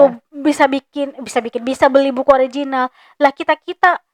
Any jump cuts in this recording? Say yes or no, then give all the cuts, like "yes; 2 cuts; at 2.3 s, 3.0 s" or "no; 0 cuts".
no; 0 cuts